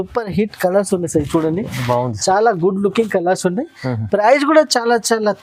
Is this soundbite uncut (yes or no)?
yes